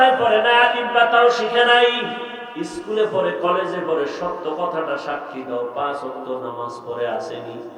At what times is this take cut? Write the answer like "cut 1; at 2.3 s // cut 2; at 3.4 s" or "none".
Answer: cut 1; at 2.4 s